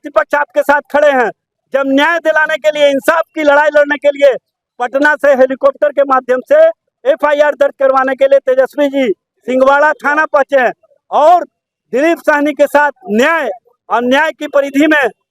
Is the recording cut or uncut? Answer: uncut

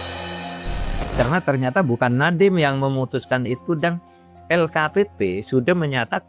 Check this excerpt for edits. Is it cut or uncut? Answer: uncut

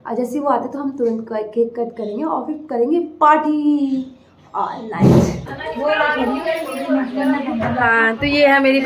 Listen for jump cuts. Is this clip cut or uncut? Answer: cut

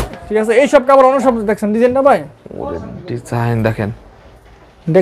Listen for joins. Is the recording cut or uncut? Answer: uncut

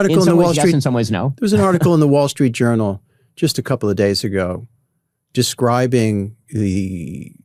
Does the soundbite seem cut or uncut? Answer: uncut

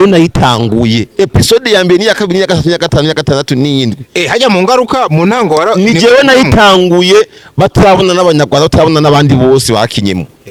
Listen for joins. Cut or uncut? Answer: uncut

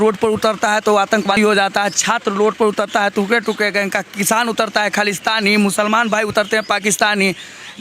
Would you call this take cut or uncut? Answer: cut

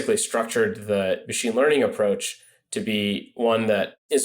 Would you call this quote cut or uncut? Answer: cut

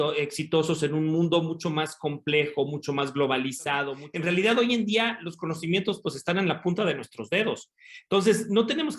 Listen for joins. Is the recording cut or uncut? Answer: cut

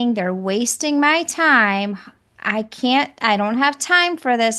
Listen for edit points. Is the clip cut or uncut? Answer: uncut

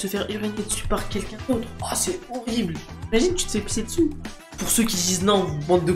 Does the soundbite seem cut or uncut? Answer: cut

